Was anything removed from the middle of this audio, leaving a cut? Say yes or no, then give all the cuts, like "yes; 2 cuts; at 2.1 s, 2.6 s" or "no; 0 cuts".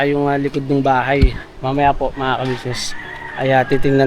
yes; 1 cut; at 1.5 s